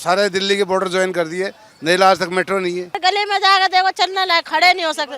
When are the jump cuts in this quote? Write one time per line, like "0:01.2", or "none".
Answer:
0:03.0